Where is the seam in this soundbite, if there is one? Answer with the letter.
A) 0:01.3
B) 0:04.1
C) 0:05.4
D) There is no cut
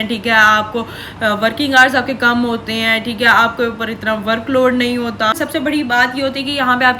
C